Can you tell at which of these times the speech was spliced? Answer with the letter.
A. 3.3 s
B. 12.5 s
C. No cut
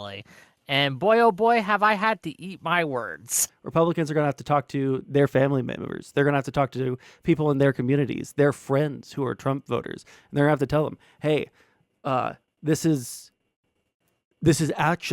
A